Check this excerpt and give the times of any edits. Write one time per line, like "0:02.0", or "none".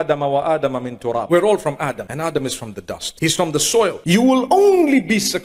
0:01.2
0:02.1
0:03.0
0:04.4